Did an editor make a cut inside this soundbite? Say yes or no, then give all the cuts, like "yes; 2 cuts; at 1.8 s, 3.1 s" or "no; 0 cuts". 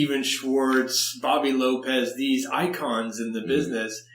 no; 0 cuts